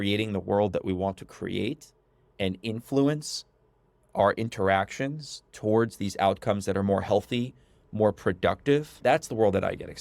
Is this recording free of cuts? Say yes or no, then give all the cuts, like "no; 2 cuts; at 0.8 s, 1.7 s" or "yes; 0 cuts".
no; 1 cut; at 9.0 s